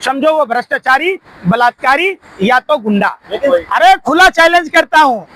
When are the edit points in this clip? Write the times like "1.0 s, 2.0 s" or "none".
3.5 s